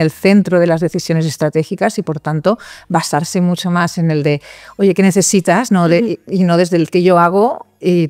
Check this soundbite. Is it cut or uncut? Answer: uncut